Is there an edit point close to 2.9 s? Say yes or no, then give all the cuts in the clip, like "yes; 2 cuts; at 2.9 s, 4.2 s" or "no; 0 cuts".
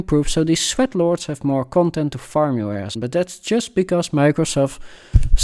yes; 1 cut; at 2.9 s